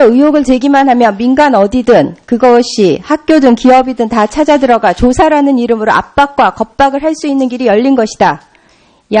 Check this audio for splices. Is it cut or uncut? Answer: cut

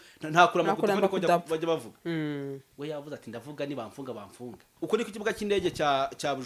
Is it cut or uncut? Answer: cut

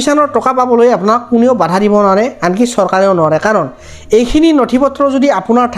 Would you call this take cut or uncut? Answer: uncut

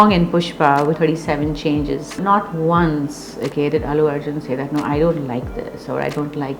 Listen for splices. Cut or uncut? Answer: cut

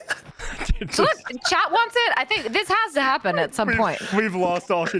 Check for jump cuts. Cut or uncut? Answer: uncut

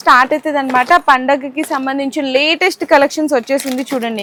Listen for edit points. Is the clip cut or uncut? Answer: uncut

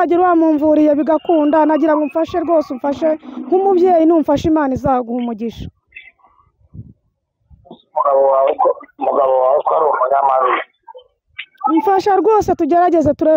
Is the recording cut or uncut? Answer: uncut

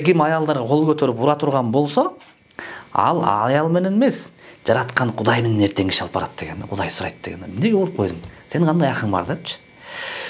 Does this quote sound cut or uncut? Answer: uncut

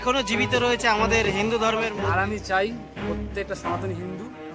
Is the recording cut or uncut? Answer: cut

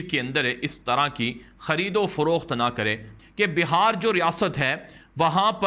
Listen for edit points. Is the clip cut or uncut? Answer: cut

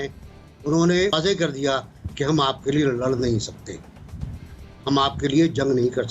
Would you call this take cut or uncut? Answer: cut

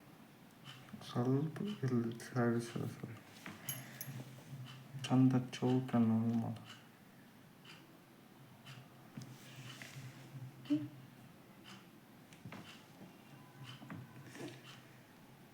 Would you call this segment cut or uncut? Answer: cut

